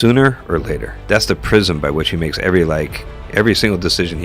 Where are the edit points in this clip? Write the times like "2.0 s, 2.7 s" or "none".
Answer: 0.9 s

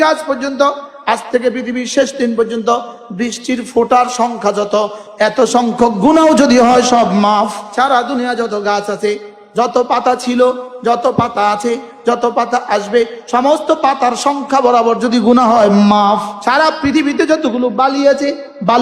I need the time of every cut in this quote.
7.6 s, 16.3 s

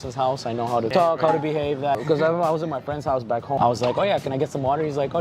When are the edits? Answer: 0.9 s, 2.0 s, 3.6 s

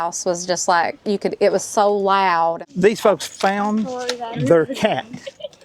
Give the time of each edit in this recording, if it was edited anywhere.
2.6 s

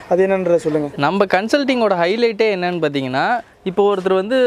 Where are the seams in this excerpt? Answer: none

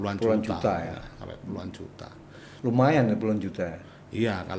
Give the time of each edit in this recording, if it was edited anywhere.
none

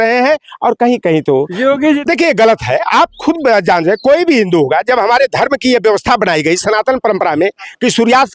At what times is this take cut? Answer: 2.0 s

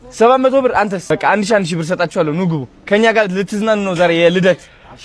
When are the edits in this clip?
1.1 s

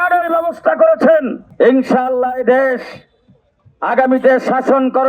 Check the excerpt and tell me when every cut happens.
1.4 s

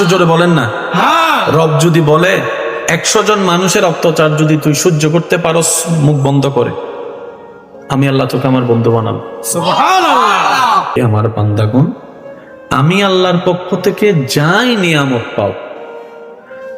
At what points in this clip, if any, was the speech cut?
10.9 s

